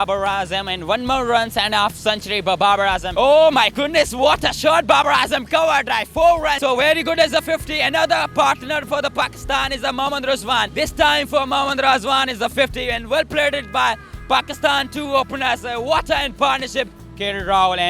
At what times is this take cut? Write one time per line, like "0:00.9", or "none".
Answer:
0:03.1
0:06.6
0:10.7
0:17.0